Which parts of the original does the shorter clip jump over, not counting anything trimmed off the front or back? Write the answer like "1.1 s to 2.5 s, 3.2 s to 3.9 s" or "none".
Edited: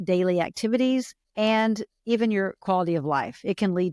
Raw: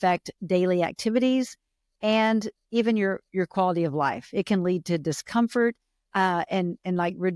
1.6 s to 1.9 s, 3.3 s to 3.5 s